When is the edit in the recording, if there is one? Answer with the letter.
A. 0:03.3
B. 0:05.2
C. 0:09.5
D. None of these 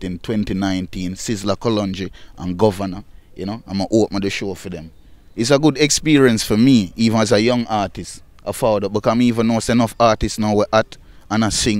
B